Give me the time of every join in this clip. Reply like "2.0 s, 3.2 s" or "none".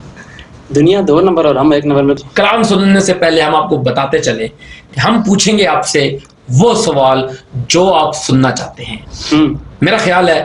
2.2 s